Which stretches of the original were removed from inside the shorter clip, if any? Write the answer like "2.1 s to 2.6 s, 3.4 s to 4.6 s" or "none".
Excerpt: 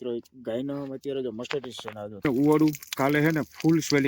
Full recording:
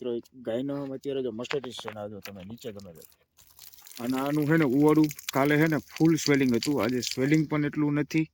2.2 s to 4.6 s

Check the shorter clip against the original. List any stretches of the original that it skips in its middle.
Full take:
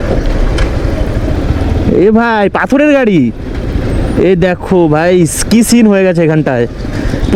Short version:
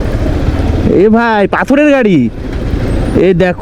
none

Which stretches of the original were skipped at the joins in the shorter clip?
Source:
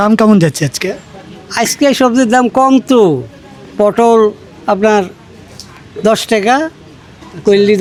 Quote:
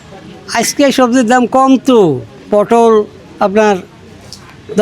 3.3 s to 3.6 s

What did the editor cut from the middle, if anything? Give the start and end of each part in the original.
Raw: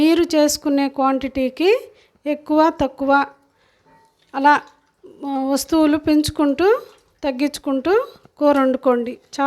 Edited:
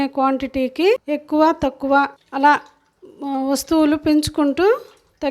1.9 s to 2.2 s, 3.4 s to 4.2 s

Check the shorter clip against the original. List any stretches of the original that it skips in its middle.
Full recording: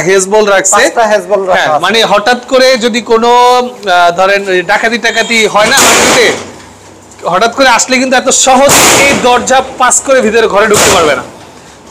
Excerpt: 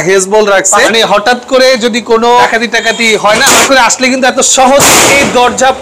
0.9 s to 1.9 s, 3.5 s to 4.8 s, 6.0 s to 7.6 s

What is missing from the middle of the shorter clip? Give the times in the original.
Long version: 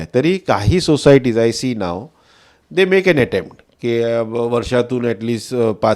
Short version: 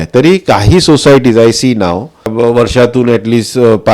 2.3 s to 4.3 s

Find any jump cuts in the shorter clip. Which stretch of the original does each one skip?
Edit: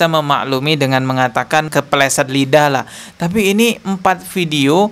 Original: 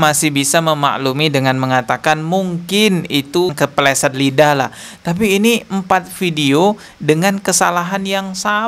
2.2 s to 3.5 s

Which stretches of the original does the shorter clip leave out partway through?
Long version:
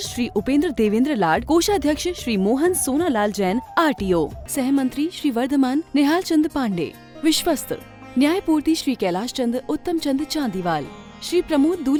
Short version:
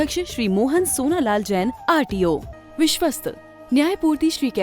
4.4 s to 7.0 s

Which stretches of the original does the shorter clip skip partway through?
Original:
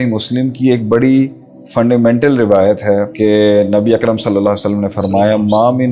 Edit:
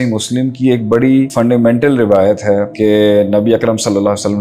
1.3 s to 1.7 s

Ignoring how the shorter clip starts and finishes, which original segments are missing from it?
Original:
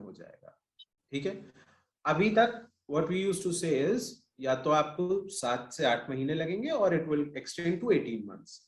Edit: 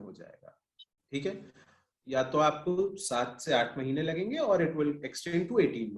1.9 s to 4.2 s

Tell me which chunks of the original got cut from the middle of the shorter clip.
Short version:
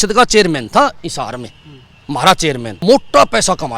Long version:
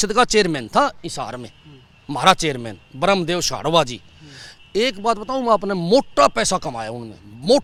2.8 s to 5.8 s

